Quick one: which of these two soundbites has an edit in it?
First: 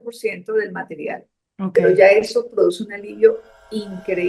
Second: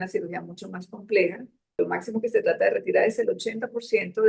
second; 1 cut; at 1.8 s

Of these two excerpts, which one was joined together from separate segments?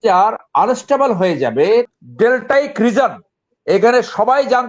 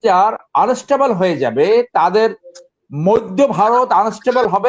first; 1 cut; at 1.9 s

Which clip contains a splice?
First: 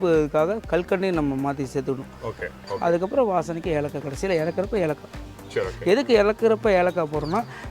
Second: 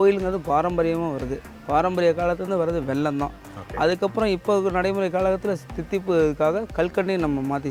first; 1 cut; at 2.6 s

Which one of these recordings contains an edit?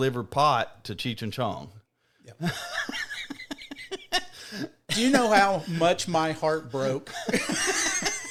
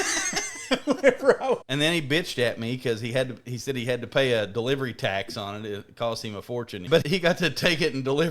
second; 2 cuts; at 1.7 s, 7.0 s

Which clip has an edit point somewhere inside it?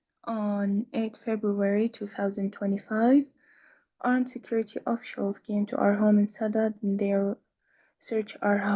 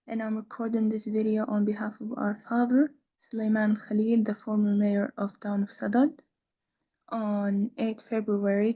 second; 1 cut; at 1.3 s

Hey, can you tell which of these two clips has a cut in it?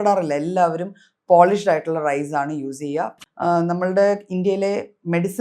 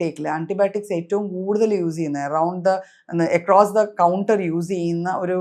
first; 1 cut; at 3.2 s

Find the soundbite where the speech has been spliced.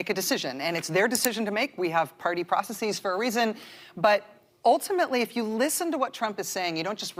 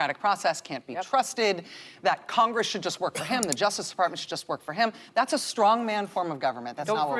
second; 1 cut; at 5.3 s

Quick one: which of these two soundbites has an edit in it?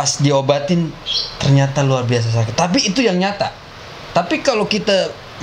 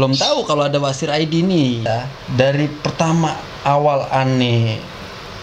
second; 1 cut; at 1.9 s

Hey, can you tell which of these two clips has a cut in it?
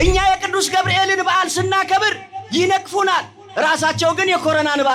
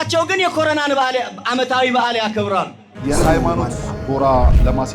second; 1 cut; at 2.9 s

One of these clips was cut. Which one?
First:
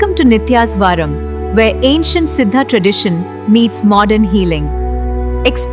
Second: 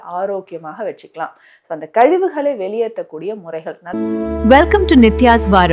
second; 1 cut; at 3.8 s

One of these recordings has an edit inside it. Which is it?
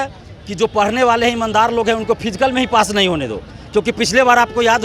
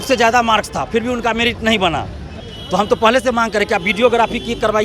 second; 1 cut; at 2.3 s

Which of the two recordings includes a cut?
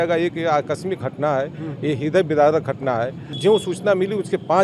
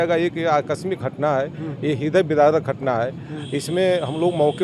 first; 1 cut; at 3.4 s

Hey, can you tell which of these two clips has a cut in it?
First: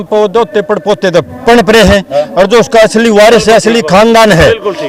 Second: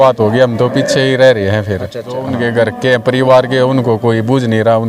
second; 1 cut; at 2.3 s

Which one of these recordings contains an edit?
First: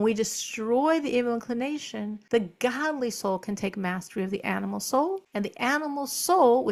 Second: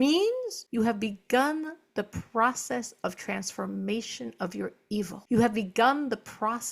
second; 1 cut; at 5.2 s

